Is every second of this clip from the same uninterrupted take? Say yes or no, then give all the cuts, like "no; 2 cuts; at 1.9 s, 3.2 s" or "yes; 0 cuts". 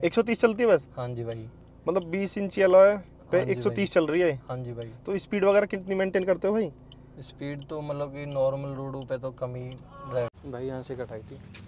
yes; 0 cuts